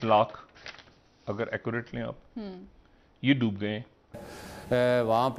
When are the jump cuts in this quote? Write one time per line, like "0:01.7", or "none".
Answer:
0:04.1